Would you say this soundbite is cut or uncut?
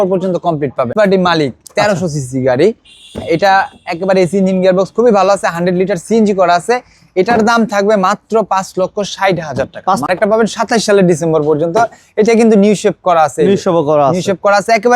cut